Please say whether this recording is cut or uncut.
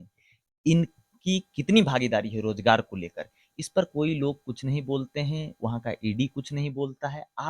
uncut